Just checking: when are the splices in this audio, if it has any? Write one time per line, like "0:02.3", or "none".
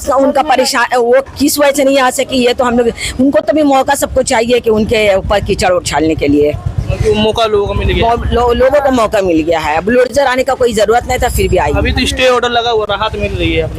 none